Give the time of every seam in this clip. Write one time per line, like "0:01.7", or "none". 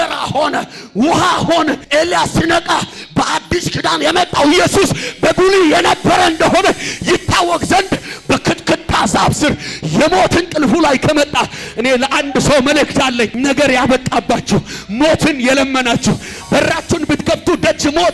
0:01.8
0:13.3